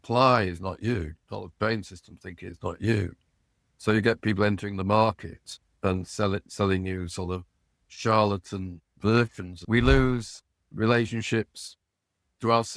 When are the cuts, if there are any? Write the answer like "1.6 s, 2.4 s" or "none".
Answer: 9.6 s